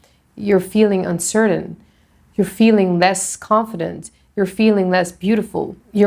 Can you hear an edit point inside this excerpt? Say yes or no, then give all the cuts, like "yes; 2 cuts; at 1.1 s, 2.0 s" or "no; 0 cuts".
no; 0 cuts